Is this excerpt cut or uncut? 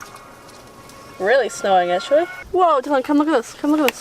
cut